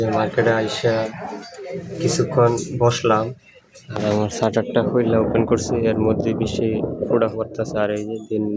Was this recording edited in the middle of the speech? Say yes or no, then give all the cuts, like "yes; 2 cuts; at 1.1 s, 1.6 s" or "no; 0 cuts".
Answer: no; 0 cuts